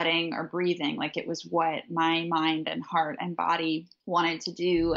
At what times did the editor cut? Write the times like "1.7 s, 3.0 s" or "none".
3.9 s